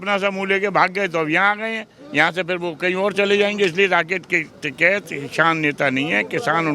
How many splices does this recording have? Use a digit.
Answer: 0